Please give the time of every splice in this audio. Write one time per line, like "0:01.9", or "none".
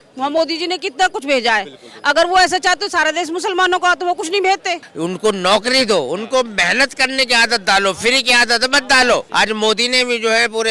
0:04.9
0:09.3